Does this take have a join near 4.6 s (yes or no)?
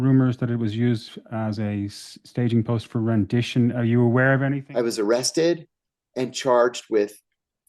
yes